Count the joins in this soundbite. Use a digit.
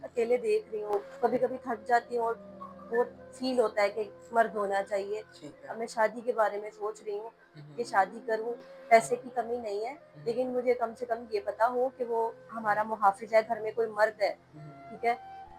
1